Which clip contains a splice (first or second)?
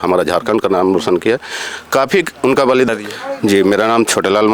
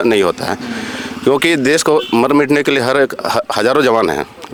first